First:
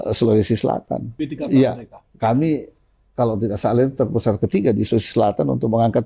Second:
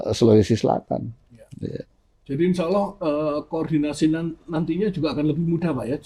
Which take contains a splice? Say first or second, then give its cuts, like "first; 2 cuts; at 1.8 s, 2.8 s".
first; 1 cut; at 1.1 s